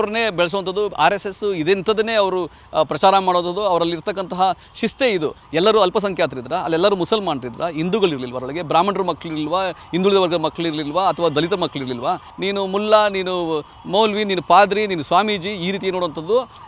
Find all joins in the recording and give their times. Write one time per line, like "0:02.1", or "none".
0:05.4
0:12.3